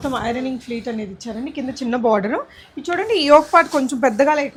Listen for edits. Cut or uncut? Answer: uncut